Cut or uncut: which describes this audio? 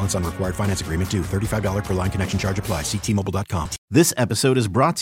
cut